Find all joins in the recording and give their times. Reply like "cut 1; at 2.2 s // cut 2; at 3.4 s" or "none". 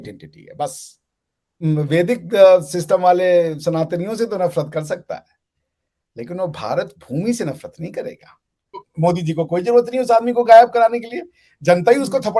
cut 1; at 1.6 s // cut 2; at 8.8 s